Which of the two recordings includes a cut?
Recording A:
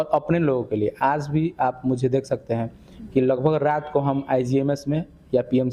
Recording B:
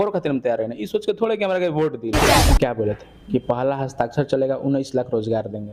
B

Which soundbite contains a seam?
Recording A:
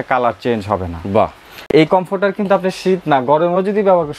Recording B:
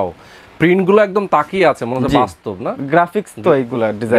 A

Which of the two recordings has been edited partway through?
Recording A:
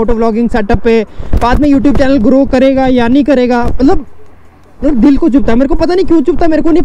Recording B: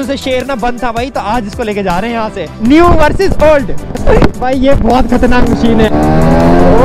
B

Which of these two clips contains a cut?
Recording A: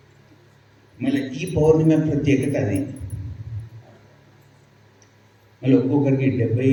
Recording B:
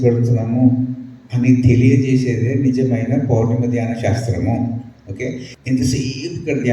B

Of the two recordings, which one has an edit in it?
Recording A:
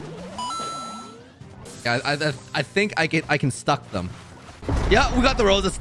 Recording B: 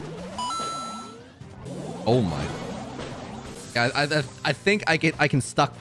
A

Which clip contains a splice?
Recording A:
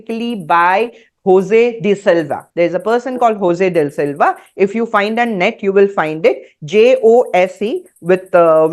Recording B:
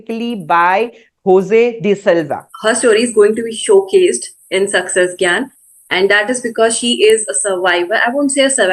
B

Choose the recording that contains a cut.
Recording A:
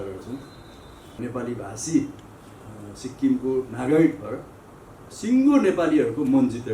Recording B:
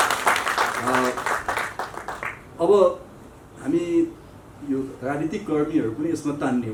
A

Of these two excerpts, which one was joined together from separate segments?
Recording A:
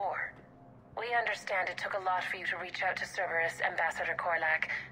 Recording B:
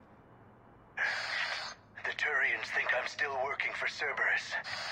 B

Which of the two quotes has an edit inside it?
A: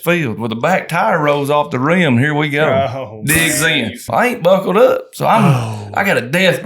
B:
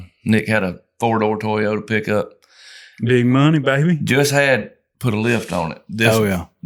A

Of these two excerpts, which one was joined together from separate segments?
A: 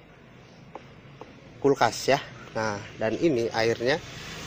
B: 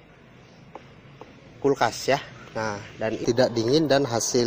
B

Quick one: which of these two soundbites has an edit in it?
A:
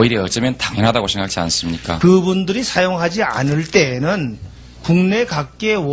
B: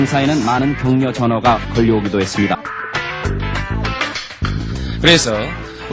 A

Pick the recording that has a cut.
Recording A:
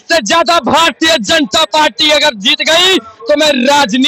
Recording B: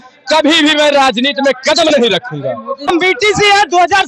B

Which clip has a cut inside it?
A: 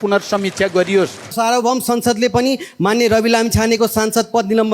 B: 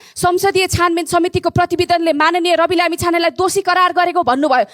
A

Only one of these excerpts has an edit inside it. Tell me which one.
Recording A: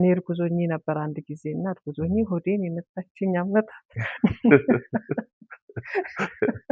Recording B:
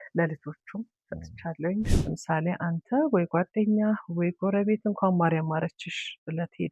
B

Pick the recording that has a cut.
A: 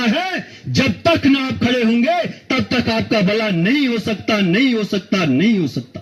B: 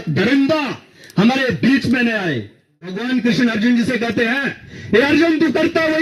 B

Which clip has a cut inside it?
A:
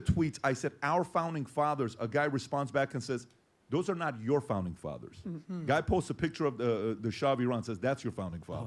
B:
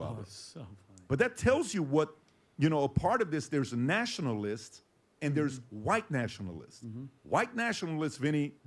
B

